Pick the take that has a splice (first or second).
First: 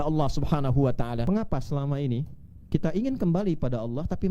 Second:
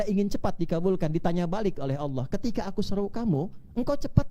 first